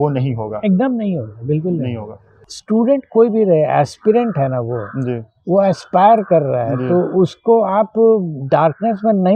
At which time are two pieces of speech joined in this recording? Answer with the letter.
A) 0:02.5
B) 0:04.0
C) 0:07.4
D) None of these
A